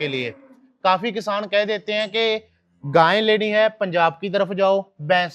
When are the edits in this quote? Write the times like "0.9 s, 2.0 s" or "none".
none

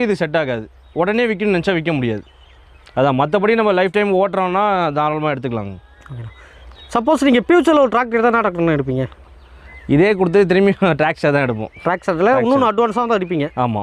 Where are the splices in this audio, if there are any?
none

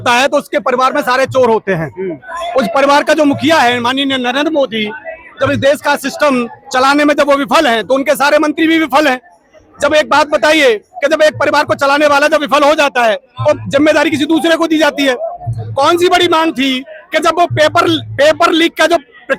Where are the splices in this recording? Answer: none

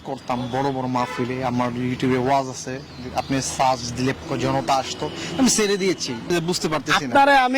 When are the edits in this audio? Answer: 4.2 s, 6.3 s

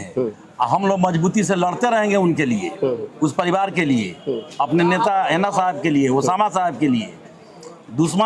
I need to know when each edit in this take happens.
none

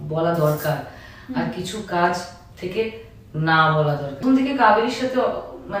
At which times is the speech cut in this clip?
4.2 s

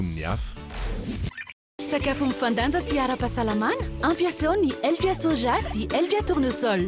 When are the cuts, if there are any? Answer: 1.7 s

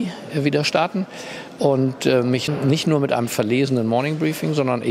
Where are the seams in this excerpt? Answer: 2.5 s

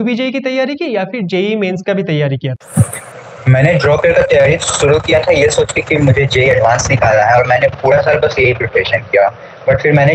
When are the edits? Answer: 2.6 s

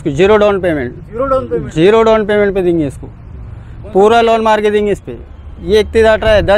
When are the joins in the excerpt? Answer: none

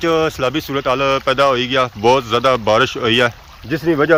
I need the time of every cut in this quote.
none

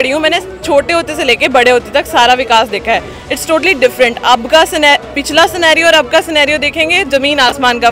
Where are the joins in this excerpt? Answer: none

